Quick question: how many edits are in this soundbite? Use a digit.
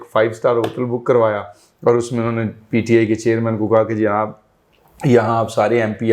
0